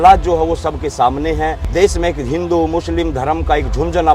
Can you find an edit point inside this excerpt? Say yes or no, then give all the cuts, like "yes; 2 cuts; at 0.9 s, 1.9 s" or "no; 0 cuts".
yes; 1 cut; at 1.6 s